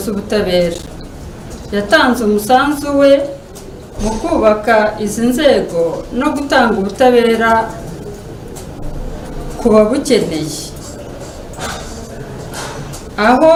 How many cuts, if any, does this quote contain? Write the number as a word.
zero